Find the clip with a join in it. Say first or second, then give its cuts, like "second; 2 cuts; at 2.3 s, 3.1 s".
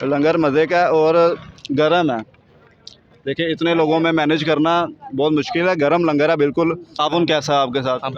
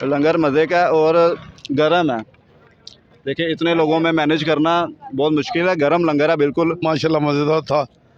first; 1 cut; at 6.8 s